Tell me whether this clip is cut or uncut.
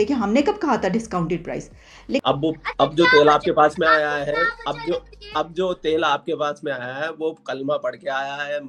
cut